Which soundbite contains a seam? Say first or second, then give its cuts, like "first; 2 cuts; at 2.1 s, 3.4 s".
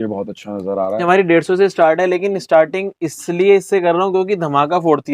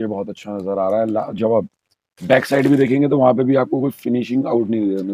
first; 1 cut; at 1.0 s